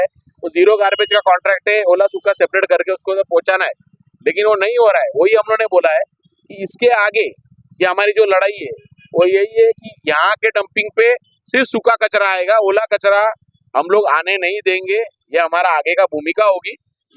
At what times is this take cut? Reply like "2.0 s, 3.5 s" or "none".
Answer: none